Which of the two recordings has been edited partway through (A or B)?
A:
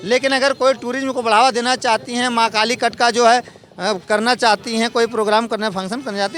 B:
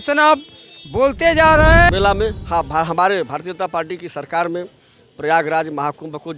B